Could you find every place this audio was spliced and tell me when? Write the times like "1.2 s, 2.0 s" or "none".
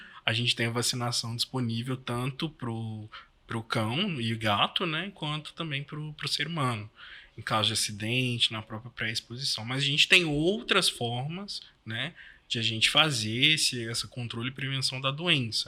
none